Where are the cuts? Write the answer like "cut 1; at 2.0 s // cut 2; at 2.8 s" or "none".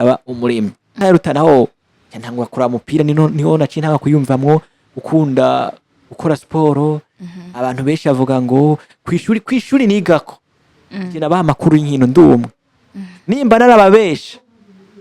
cut 1; at 1.0 s